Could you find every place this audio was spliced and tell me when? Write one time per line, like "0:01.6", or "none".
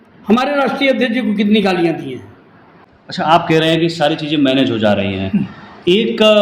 0:03.0

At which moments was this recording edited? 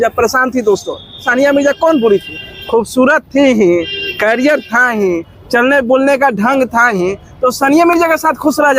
0:01.3

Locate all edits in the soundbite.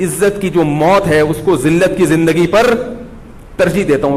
none

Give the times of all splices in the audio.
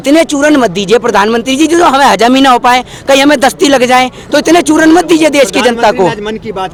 none

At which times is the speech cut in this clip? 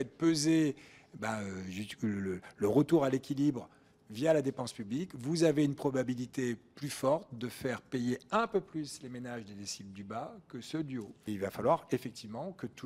0:11.3

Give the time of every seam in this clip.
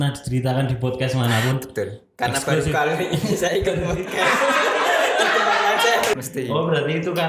0:06.1

